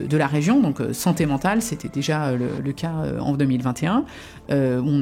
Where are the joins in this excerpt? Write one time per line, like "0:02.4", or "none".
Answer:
none